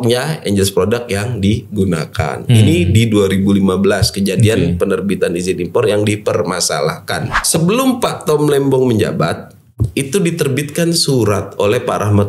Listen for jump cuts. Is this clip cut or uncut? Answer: cut